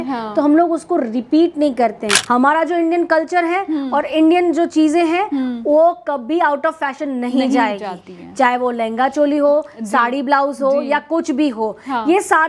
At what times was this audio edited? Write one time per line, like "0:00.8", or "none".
0:02.2